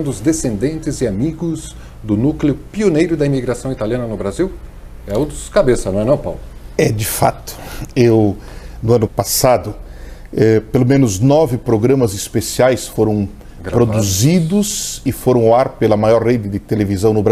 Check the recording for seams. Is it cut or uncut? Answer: cut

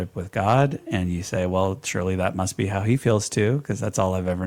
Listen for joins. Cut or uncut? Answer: uncut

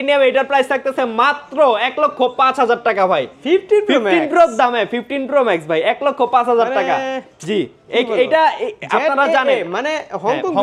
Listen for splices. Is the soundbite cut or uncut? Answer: uncut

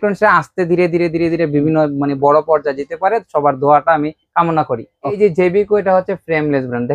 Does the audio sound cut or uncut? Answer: cut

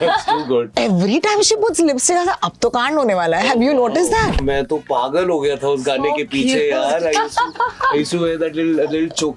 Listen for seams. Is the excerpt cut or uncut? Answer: cut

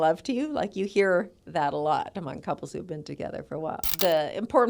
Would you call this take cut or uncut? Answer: cut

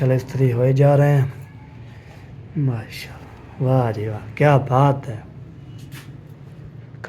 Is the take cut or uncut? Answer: uncut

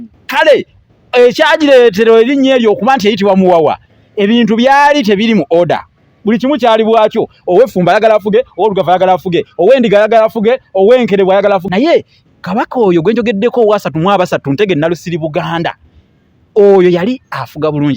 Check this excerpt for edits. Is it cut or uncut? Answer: cut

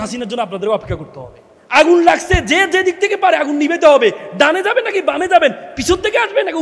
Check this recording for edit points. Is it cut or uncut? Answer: cut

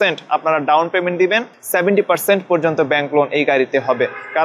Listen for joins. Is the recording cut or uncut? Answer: cut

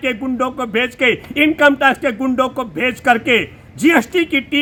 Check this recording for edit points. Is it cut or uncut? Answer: uncut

